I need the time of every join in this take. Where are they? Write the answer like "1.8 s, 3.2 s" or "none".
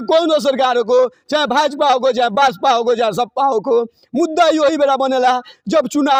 none